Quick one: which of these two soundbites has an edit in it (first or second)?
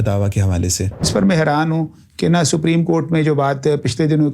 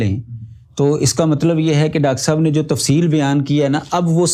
first